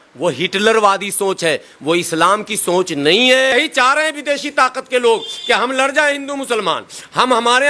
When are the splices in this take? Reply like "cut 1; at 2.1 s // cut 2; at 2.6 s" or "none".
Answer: cut 1; at 3.5 s